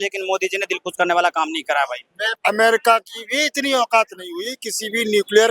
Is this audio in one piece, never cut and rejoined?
no; 1 cut; at 2.3 s

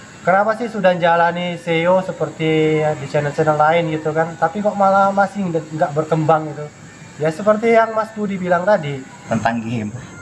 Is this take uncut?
no; 1 cut; at 9.1 s

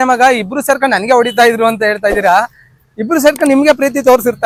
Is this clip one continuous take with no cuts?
yes; 0 cuts

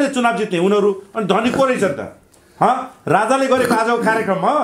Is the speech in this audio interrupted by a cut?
no; 0 cuts

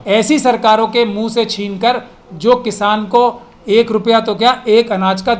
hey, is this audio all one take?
yes; 0 cuts

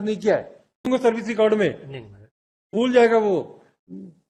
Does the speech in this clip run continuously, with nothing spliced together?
no; 2 cuts; at 0.9 s, 2.8 s

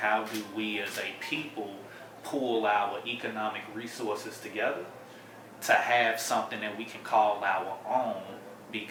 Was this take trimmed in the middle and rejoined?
no; 0 cuts

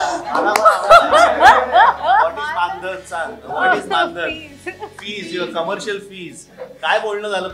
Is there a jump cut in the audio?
no; 0 cuts

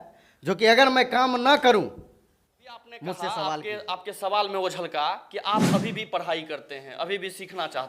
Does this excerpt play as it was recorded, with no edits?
no; 1 cut; at 3.7 s

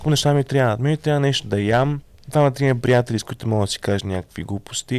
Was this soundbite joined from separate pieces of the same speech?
yes; 1 cut; at 2.1 s

